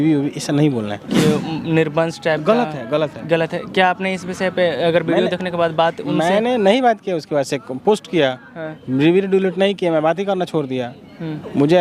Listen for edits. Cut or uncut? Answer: cut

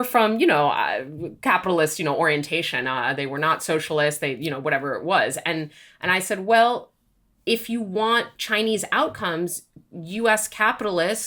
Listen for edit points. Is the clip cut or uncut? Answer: uncut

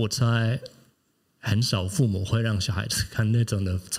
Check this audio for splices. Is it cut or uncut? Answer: uncut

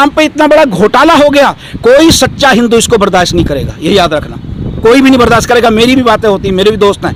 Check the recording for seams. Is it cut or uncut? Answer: uncut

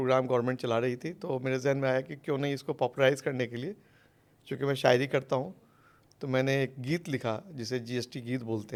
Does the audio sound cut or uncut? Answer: uncut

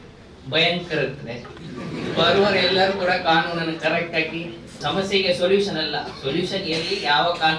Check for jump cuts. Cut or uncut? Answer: cut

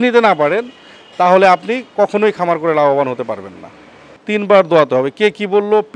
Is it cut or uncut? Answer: cut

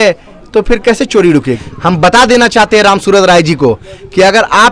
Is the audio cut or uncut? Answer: cut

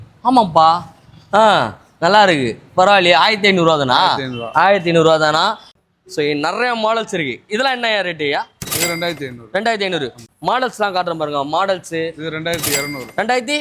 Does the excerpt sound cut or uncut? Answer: cut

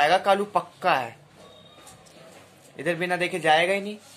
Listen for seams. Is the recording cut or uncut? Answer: uncut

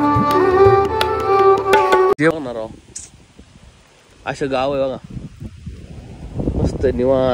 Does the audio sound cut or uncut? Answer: cut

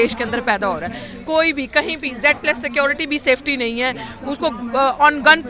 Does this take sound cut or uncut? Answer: uncut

